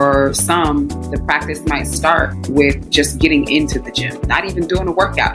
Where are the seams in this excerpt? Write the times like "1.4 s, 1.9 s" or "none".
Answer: 1.0 s